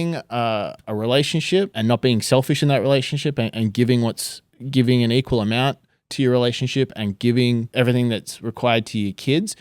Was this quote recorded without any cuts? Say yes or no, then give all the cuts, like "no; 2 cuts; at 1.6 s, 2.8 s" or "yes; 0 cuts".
no; 3 cuts; at 0.8 s, 1.7 s, 7.7 s